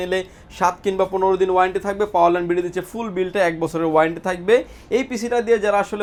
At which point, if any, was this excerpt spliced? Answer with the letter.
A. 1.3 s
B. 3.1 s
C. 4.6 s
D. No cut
D